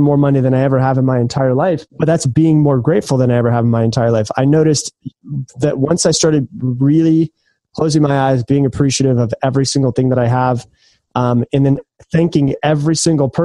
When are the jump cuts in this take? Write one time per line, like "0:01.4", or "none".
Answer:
0:01.9